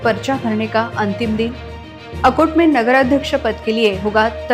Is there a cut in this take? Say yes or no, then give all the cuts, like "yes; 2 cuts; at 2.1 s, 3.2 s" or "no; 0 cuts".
no; 0 cuts